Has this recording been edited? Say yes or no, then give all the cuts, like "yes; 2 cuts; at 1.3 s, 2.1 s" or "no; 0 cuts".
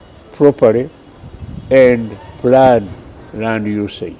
no; 0 cuts